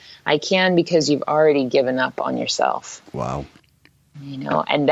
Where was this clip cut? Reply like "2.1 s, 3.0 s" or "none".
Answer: none